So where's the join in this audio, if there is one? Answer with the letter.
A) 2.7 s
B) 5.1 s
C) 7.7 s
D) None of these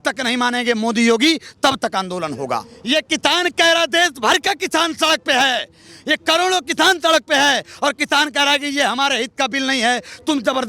A